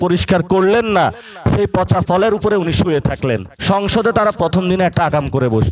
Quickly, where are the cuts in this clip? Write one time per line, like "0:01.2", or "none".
0:03.5